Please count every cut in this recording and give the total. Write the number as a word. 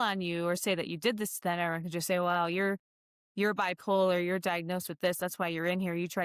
zero